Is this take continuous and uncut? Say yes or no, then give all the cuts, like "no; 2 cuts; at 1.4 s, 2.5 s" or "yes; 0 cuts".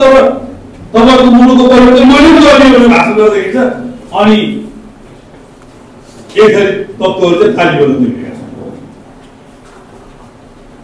yes; 0 cuts